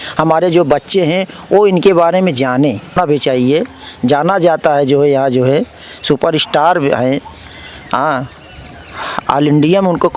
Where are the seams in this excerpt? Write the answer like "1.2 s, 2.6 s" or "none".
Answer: 2.9 s

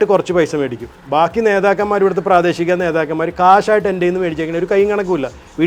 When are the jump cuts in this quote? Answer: none

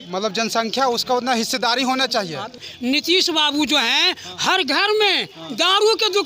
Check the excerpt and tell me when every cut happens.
2.6 s

